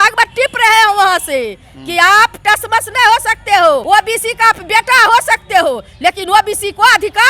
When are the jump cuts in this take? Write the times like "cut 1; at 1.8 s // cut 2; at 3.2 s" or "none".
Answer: cut 1; at 3.8 s